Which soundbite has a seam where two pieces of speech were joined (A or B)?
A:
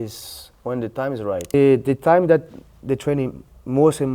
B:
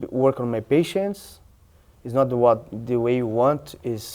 A